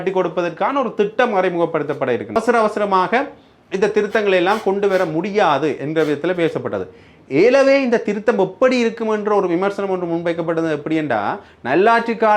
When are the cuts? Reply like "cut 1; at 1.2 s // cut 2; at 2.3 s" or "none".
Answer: cut 1; at 2.4 s